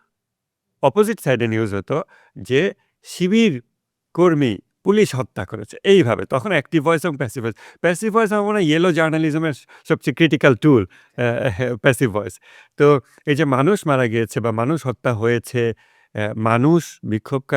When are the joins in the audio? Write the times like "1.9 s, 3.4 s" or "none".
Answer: none